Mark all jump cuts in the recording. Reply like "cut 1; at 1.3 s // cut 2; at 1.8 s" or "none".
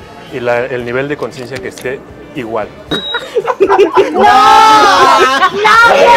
cut 1; at 2.9 s